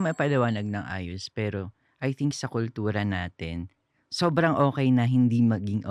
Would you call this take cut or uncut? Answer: uncut